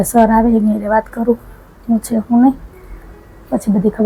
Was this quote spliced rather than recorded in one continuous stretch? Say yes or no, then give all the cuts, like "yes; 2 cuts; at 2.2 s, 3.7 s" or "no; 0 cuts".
no; 0 cuts